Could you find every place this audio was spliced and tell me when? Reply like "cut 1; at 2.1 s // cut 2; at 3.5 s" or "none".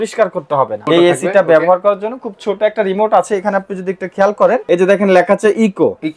cut 1; at 0.8 s // cut 2; at 4.6 s